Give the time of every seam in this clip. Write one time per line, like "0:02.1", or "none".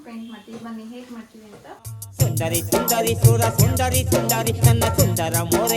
0:01.9